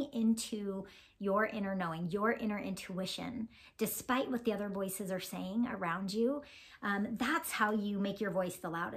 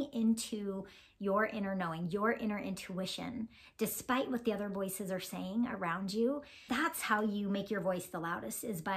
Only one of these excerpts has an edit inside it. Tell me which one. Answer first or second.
second